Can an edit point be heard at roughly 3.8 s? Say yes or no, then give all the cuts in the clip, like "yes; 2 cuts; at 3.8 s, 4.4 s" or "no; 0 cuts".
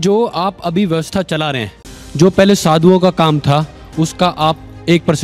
no; 1 cut; at 2.0 s